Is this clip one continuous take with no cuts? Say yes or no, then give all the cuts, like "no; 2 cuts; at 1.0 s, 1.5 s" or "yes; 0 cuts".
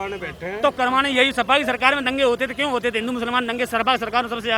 yes; 0 cuts